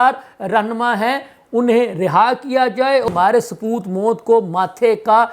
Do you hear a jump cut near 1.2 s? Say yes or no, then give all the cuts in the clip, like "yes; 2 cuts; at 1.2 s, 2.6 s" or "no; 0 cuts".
no; 1 cut; at 3.1 s